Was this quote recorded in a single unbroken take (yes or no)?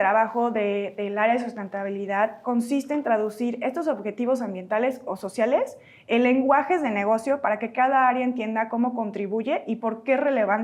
yes